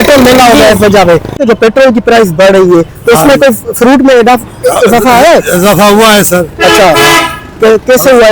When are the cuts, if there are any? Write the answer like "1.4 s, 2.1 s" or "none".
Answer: 1.4 s